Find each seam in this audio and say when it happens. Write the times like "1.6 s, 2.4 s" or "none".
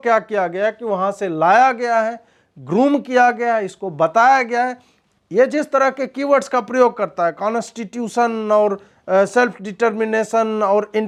none